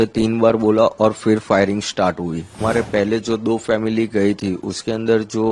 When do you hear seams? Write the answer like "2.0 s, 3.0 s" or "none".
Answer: 2.6 s